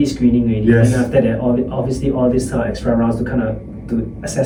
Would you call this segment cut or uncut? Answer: uncut